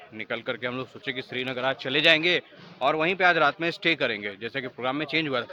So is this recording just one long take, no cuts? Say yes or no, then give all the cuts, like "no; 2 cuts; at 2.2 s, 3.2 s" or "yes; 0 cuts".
yes; 0 cuts